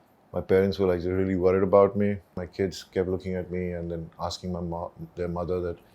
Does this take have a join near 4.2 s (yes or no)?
no